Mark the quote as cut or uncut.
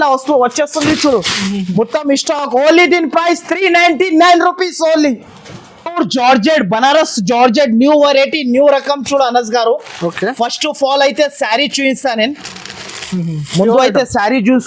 uncut